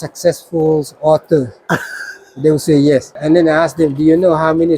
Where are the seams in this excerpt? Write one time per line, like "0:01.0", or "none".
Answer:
0:03.2

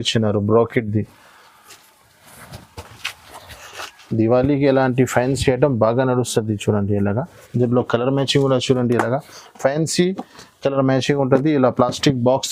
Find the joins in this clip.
none

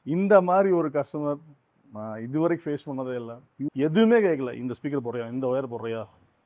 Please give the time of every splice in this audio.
0:03.7

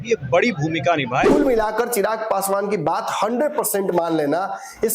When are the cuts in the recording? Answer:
0:01.3

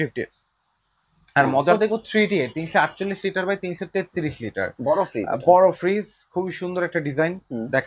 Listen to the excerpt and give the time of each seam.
0:01.7

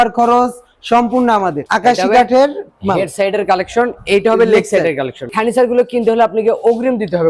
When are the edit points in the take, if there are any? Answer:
0:01.6
0:05.3

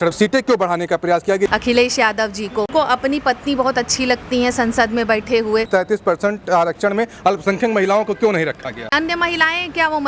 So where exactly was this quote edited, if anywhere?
0:01.5
0:02.7
0:05.7
0:08.9

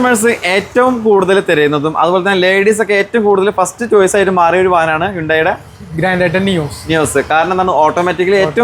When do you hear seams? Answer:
none

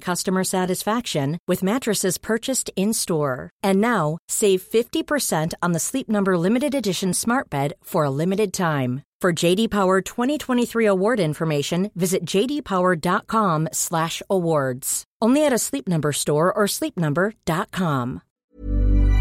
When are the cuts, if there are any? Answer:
0:18.3

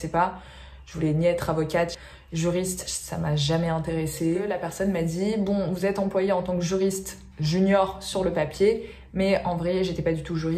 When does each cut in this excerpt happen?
0:02.0
0:04.6

